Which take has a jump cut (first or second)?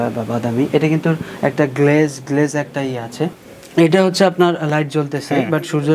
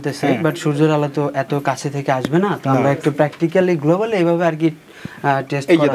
first